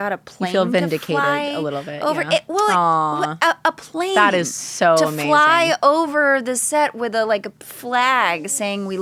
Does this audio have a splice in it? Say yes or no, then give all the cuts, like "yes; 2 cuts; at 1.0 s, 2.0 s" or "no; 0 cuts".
no; 0 cuts